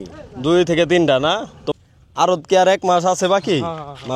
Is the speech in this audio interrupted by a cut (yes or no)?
yes